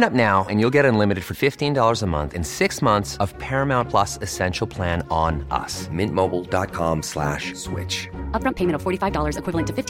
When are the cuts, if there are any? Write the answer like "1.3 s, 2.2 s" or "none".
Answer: none